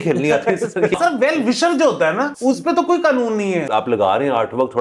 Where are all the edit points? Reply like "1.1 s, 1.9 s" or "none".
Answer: 1.0 s, 2.3 s, 3.6 s